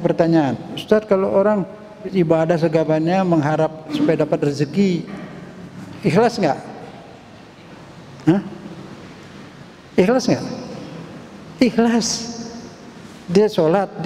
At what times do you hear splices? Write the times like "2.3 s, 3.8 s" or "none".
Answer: 2.1 s, 3.9 s